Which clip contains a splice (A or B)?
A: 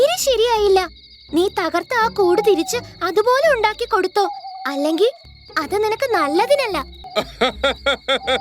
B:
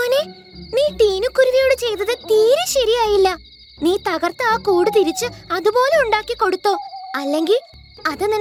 A